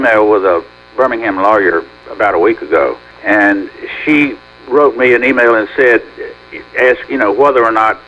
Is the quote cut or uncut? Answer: cut